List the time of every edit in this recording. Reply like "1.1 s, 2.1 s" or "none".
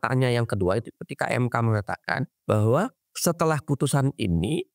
2.3 s, 3.0 s